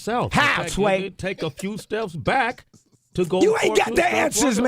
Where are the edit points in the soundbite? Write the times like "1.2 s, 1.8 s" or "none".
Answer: 1.1 s